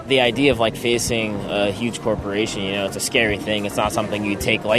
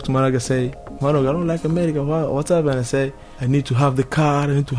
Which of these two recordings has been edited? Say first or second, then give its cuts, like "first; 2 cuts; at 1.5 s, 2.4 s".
second; 1 cut; at 3.3 s